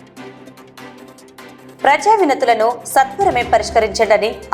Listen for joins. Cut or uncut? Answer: cut